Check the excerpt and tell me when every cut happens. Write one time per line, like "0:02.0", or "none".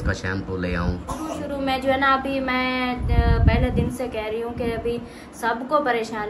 0:01.3

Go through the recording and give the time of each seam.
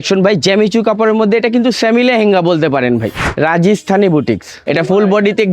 0:03.2

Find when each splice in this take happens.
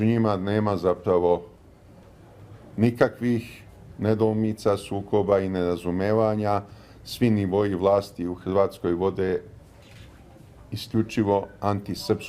0:01.5

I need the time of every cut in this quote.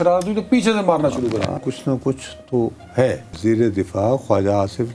0:01.6
0:03.3

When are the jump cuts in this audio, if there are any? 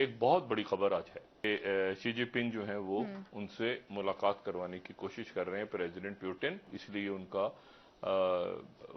0:01.4
0:06.8

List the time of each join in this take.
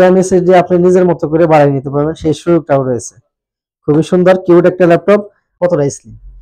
0:05.4

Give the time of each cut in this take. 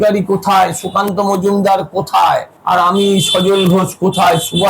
0:02.5

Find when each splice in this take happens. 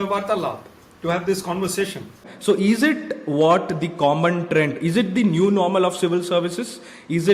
0:02.3

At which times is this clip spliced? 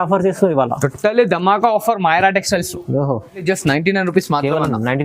0:03.4

